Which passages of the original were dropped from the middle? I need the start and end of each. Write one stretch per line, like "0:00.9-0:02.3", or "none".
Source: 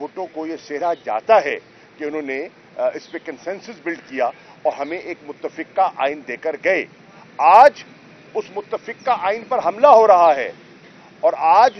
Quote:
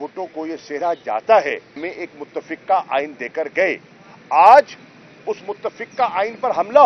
0:01.8-0:04.9